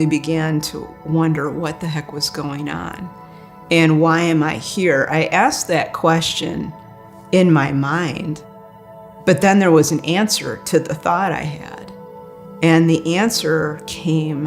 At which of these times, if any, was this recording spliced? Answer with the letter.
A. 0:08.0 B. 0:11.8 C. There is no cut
C